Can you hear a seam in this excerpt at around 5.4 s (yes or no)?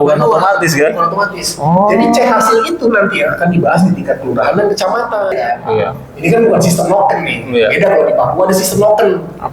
yes